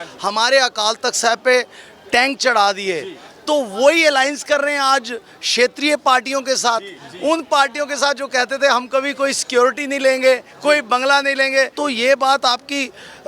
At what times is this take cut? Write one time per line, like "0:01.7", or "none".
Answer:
0:11.7